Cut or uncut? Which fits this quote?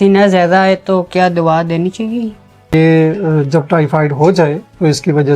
cut